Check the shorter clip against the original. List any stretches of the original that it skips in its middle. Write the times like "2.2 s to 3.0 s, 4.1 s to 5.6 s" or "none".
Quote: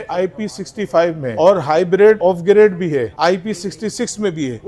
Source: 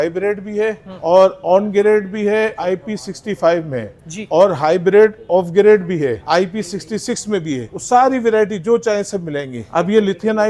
3.8 s to 4.2 s, 5.1 s to 5.3 s

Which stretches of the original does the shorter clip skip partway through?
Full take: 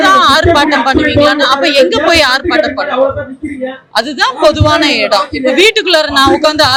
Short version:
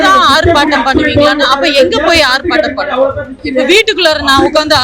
3.4 s to 5.3 s

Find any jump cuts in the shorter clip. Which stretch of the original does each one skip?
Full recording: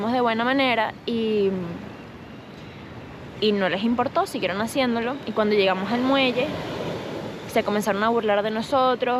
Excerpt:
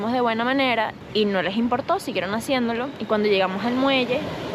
1.0 s to 3.2 s

